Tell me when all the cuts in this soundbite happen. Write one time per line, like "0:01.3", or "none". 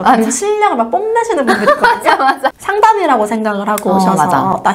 0:02.6